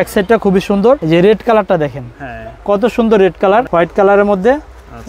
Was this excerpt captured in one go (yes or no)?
no